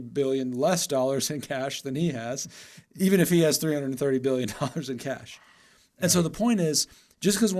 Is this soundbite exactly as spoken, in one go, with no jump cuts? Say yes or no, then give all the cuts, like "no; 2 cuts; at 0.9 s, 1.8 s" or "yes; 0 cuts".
yes; 0 cuts